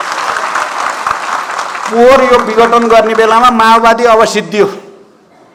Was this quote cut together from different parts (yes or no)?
no